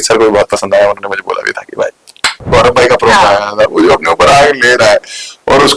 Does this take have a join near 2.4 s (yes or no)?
yes